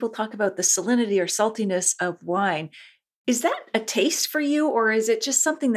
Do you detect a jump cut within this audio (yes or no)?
no